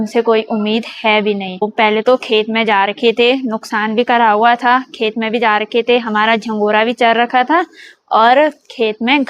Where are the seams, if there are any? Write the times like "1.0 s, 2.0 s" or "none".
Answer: 1.6 s